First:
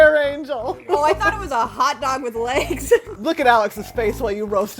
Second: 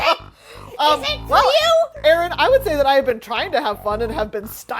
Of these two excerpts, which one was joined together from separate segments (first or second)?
first